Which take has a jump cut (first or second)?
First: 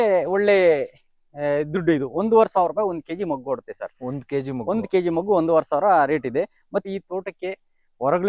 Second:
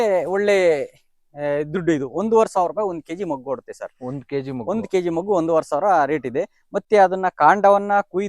first